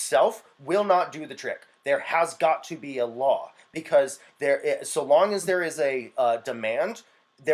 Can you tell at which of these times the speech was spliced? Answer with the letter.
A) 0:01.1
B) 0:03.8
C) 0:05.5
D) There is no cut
D